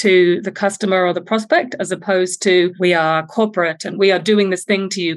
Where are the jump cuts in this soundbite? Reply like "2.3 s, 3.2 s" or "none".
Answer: 2.7 s, 3.9 s